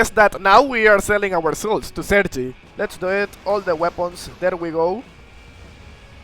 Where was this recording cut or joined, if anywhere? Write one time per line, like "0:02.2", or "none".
0:02.5

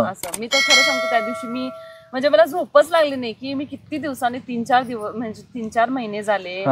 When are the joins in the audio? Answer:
none

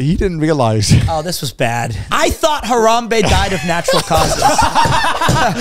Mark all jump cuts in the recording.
0:02.0

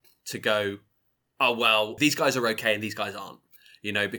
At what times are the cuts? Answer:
0:02.0

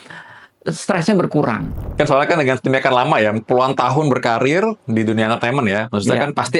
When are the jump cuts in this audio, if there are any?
0:01.8

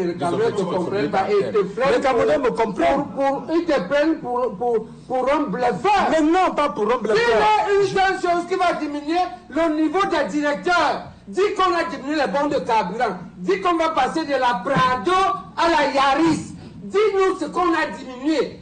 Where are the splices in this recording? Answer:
none

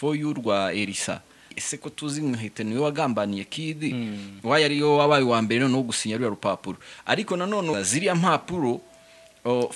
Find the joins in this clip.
0:01.5
0:07.7

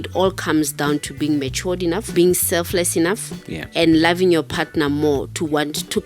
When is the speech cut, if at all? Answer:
0:02.1

